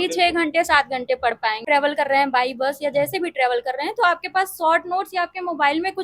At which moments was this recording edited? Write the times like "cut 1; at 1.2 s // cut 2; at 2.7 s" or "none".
cut 1; at 1.6 s